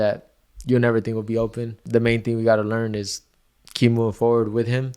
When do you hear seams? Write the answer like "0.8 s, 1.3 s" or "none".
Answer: 1.7 s